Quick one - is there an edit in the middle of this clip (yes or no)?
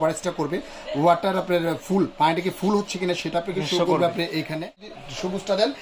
yes